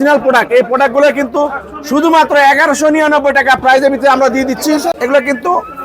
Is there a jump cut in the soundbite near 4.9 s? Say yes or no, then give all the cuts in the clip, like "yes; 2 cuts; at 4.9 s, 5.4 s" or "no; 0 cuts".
yes; 1 cut; at 4.9 s